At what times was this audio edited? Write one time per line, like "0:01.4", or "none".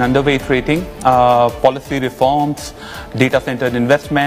none